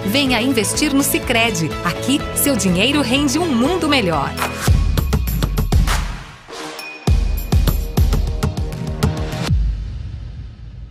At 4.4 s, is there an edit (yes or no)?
yes